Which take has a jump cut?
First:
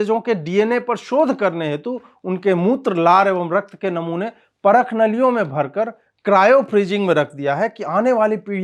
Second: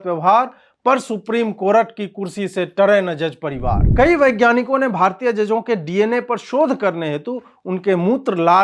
second; 1 cut; at 3.8 s

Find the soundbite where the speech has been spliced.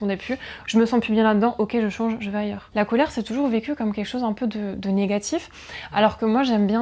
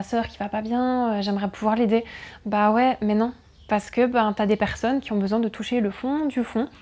first; 1 cut; at 2.6 s

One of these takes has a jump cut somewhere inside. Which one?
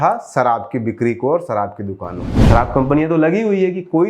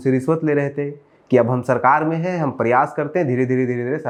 first; 1 cut; at 2.4 s

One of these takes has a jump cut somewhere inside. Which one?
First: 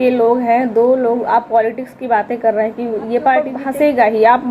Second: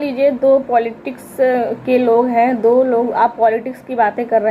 first; 1 cut; at 3.6 s

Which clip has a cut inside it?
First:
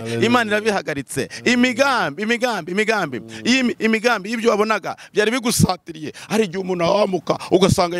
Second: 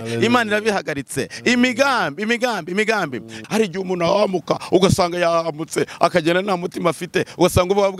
second; 1 cut; at 3.3 s

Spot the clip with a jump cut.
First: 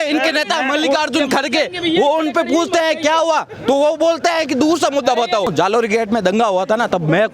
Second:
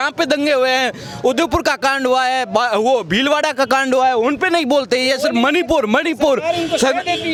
first; 1 cut; at 5.5 s

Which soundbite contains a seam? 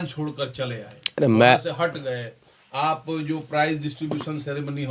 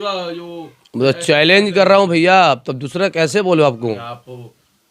second; 1 cut; at 4.0 s

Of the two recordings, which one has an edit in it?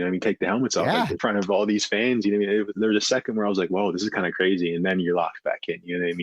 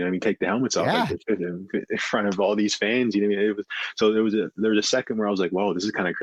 first; 2 cuts; at 1.2 s, 2.7 s

